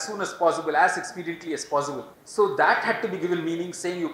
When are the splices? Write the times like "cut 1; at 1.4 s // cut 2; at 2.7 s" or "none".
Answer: cut 1; at 2.1 s